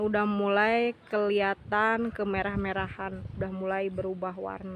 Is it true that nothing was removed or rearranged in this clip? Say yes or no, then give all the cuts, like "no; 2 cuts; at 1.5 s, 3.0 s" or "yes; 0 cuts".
yes; 0 cuts